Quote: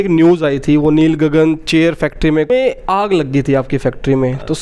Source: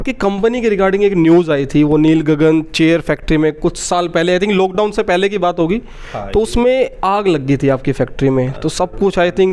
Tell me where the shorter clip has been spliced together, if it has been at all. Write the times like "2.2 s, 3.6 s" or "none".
2.5 s